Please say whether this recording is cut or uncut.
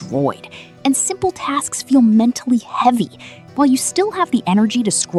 uncut